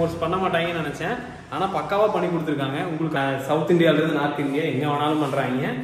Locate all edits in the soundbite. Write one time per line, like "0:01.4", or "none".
0:03.2